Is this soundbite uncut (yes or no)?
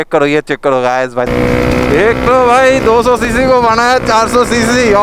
no